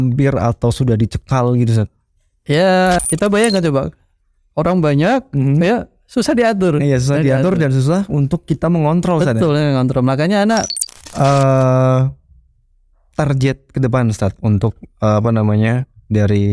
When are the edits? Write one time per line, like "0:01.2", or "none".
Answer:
0:03.0
0:10.8